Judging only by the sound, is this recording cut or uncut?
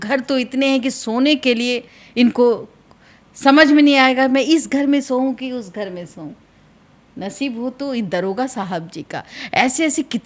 uncut